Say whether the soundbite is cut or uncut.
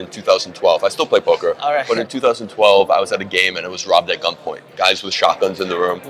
uncut